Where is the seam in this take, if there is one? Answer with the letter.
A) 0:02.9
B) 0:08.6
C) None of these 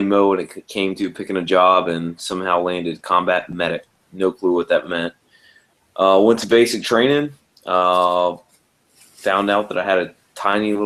B